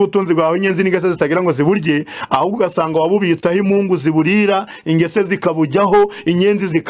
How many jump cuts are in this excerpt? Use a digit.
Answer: 0